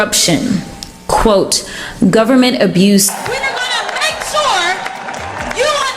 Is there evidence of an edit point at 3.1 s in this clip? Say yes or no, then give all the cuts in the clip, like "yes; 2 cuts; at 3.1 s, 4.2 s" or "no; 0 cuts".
yes; 1 cut; at 3.1 s